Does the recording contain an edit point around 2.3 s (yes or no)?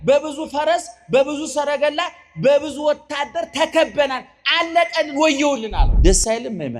no